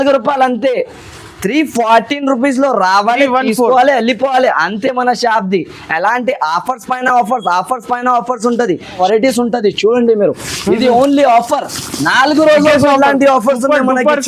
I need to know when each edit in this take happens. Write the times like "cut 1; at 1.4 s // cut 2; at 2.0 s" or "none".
cut 1; at 9.0 s